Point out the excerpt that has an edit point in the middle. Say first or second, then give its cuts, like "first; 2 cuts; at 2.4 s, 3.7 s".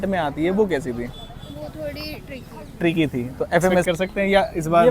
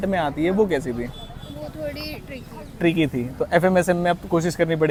first; 1 cut; at 3.8 s